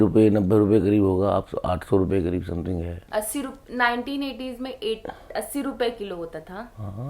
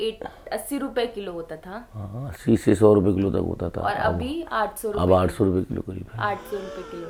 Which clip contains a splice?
first; 1 cut; at 3.0 s

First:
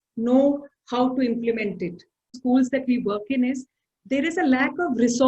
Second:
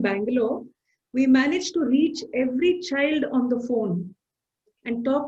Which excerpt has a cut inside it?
first; 1 cut; at 2.4 s

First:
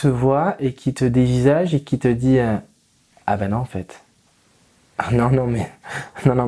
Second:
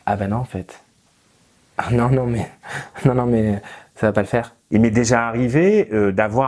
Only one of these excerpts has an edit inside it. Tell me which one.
second; 1 cut; at 4.6 s

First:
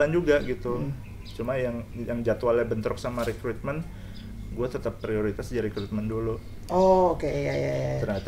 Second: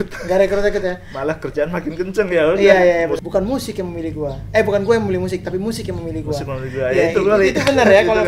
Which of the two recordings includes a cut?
second; 1 cut; at 3.2 s

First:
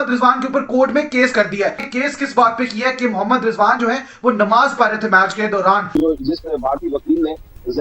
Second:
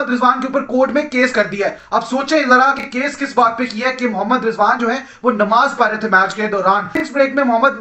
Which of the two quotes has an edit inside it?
first; 2 cuts; at 1.8 s, 5.9 s

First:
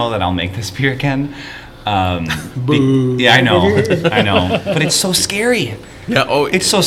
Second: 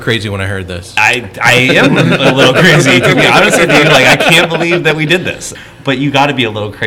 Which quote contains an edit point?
second; 1 cut; at 5.5 s

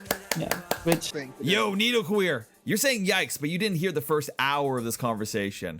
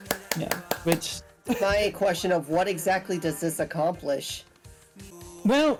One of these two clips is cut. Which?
first; 1 cut; at 1.2 s

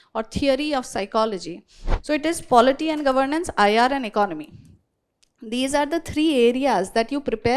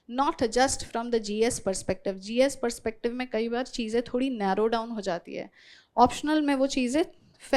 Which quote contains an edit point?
first; 1 cut; at 1.8 s

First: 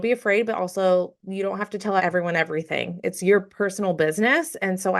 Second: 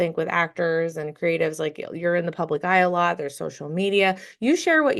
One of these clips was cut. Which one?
first; 1 cut; at 2.0 s

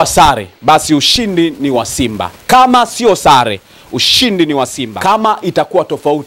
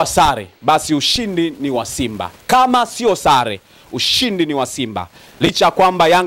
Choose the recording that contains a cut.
first; 1 cut; at 4.8 s

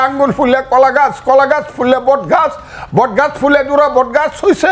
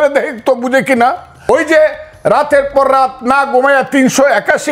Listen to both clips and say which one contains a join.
second; 1 cut; at 1.5 s

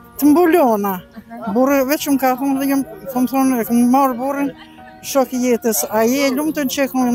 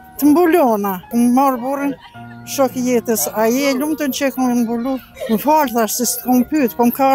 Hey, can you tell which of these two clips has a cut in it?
second; 2 cuts; at 1.1 s, 5.1 s

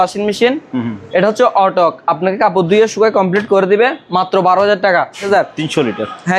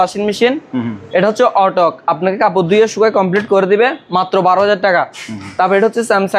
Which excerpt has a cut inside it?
first; 1 cut; at 5.2 s

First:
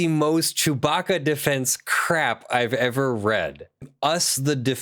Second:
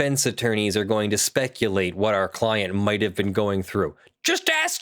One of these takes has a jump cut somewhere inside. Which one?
first; 1 cut; at 3.9 s

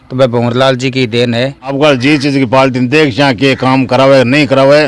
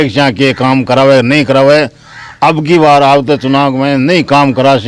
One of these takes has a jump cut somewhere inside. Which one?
first; 1 cut; at 1.7 s

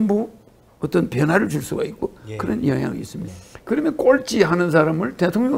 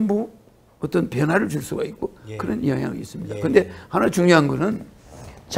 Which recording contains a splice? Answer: first; 1 cut; at 3.3 s

